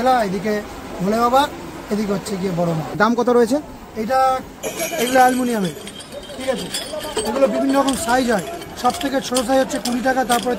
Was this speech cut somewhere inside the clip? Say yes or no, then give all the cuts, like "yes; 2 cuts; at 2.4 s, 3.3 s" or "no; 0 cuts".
yes; 2 cuts; at 3.0 s, 4.6 s